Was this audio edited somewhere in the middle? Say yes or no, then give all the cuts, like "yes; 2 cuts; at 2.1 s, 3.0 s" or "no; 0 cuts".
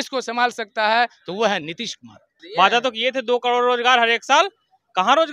yes; 1 cut; at 2.4 s